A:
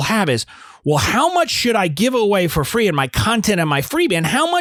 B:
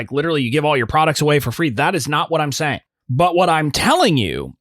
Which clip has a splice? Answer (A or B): B